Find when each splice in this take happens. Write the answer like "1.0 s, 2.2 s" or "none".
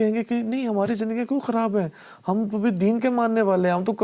none